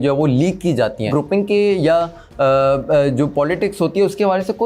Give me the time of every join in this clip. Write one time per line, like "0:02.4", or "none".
0:01.1